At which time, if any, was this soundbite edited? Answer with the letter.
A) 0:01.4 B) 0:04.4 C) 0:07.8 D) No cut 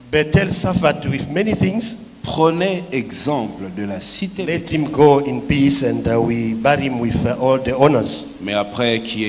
B